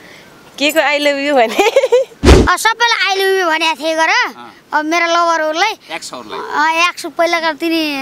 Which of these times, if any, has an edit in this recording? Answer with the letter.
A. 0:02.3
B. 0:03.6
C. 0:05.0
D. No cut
A